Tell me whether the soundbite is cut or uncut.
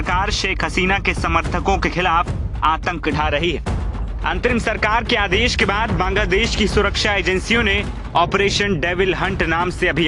uncut